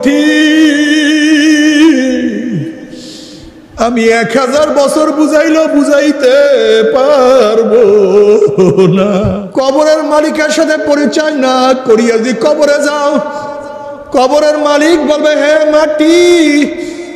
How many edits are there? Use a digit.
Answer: 1